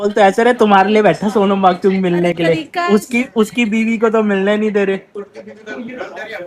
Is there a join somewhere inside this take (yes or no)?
no